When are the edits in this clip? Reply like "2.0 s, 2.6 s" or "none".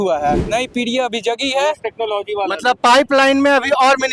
none